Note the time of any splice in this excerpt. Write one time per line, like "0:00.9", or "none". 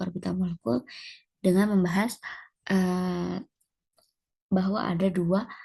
none

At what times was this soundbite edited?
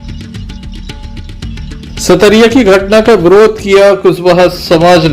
0:01.4

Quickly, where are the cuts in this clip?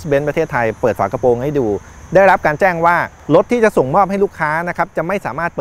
0:03.1

